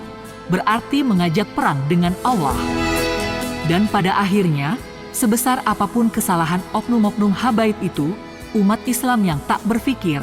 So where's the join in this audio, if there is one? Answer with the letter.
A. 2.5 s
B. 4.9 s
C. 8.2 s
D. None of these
D